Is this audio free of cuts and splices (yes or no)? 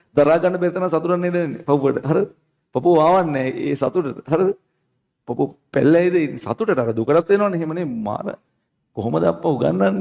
yes